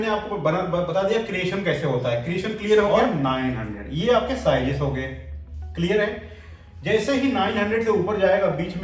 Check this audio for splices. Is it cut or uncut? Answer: cut